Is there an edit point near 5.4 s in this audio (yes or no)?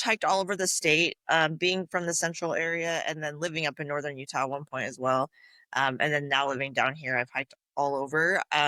no